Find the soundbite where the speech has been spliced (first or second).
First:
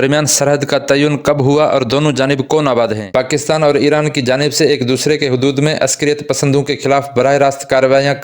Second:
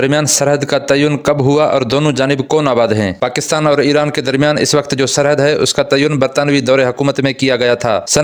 first